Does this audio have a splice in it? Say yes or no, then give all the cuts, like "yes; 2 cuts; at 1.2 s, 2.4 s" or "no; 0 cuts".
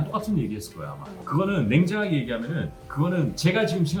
no; 0 cuts